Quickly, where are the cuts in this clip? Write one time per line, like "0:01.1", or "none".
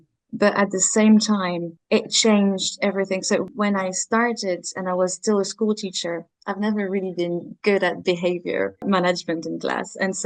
0:03.5